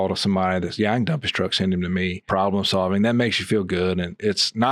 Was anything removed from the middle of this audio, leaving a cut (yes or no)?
yes